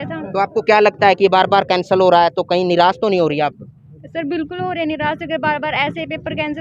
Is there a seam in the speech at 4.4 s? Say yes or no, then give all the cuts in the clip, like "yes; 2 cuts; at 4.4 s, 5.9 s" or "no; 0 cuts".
no; 0 cuts